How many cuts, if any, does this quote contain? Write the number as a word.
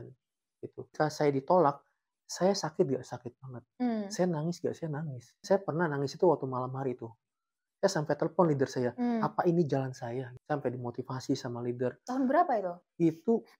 three